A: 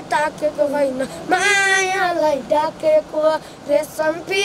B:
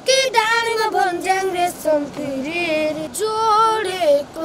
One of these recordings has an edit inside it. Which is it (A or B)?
B